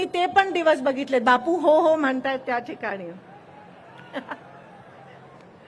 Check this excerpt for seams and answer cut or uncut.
uncut